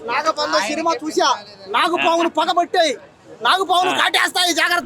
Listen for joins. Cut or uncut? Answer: uncut